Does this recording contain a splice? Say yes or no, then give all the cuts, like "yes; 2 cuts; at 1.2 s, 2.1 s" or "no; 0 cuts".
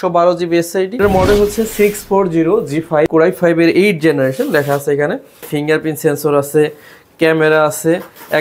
yes; 3 cuts; at 1.0 s, 3.1 s, 5.5 s